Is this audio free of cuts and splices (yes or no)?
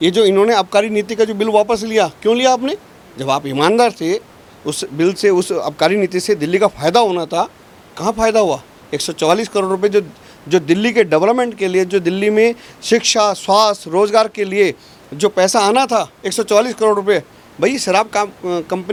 yes